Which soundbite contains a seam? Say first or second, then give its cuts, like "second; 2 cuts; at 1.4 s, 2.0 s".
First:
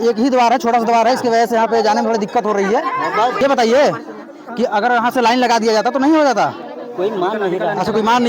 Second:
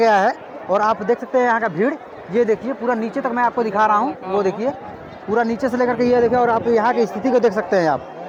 first; 1 cut; at 3.4 s